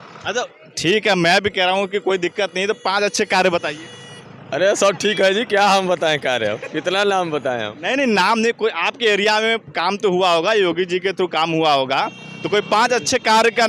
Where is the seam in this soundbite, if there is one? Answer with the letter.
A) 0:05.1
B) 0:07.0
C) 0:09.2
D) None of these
D